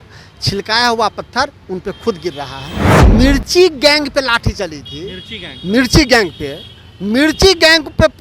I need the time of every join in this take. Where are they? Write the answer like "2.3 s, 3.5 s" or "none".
3.0 s